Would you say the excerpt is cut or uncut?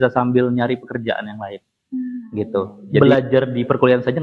cut